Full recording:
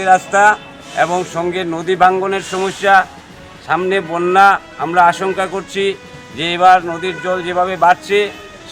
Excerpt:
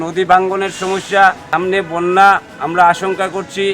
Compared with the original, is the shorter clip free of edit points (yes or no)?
no